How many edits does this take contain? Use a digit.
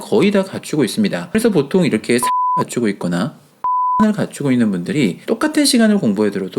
1